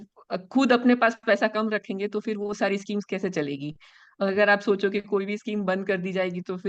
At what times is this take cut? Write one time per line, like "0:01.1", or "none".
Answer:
none